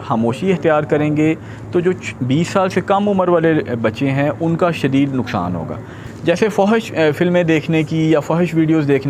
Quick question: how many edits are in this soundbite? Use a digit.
1